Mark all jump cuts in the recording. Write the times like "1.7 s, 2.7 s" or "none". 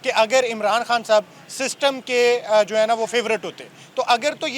none